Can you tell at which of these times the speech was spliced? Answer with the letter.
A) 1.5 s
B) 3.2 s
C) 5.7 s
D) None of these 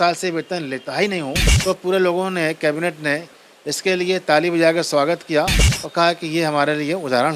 A